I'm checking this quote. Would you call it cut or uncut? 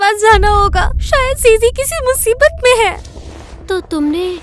uncut